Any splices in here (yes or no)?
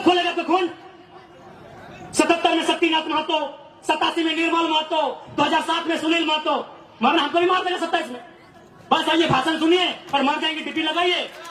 no